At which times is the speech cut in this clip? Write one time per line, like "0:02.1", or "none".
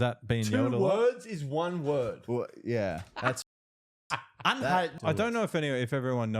0:05.0